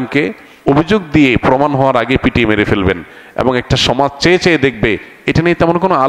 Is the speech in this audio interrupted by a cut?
no; 0 cuts

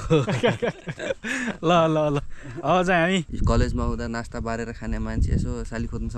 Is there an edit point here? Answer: yes; 1 cut; at 3.3 s

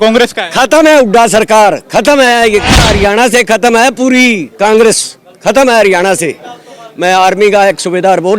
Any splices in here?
yes; 1 cut; at 2.9 s

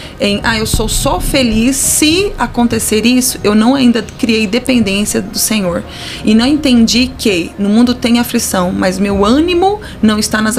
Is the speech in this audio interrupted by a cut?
no; 0 cuts

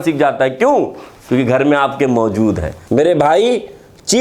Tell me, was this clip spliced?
yes; 1 cut; at 2.7 s

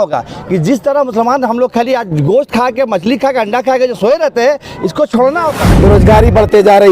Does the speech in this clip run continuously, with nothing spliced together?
no; 1 cut; at 5.7 s

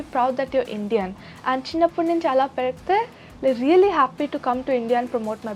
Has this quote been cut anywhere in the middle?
no; 0 cuts

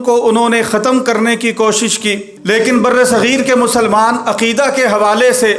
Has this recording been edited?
yes; 1 cut; at 2.3 s

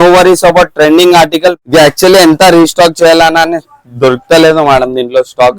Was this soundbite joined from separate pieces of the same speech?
yes; 1 cut; at 1.6 s

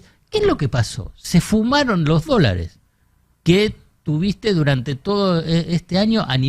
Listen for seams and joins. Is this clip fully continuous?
yes; 0 cuts

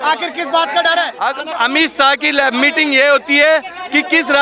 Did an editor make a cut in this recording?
yes; 1 cut; at 1.1 s

